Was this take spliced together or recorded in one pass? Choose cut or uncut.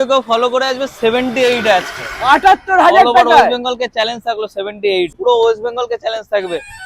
cut